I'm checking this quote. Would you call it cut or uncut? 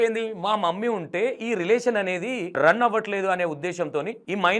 uncut